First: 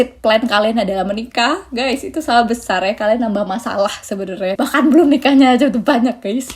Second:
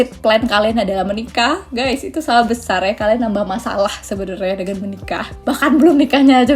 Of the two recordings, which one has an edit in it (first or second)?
first